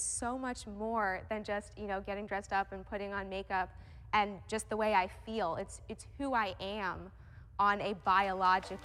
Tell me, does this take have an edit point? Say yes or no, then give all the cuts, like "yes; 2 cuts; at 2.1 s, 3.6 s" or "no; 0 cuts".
no; 0 cuts